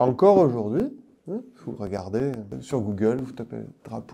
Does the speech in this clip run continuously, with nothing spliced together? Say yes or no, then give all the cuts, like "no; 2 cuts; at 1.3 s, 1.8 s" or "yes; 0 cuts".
no; 1 cut; at 2.6 s